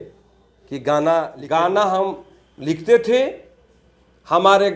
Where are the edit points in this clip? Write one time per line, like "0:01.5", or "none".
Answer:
0:01.4